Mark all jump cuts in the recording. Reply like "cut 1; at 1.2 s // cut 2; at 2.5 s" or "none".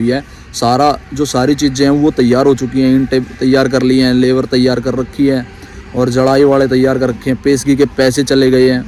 none